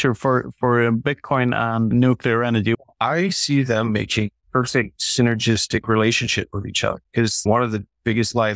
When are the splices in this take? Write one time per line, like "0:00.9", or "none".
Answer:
0:01.9
0:02.8
0:04.8
0:07.4